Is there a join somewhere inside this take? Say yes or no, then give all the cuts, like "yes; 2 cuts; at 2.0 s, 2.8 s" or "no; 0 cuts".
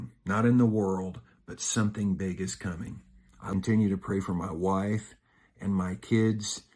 yes; 1 cut; at 3.4 s